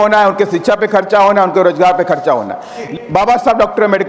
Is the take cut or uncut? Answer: cut